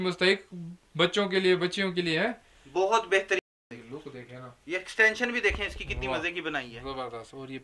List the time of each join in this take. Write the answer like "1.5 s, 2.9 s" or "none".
3.5 s